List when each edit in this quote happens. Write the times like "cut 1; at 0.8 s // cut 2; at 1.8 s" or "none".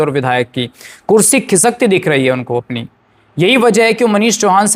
none